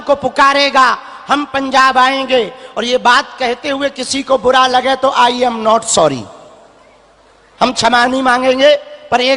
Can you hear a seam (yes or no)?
no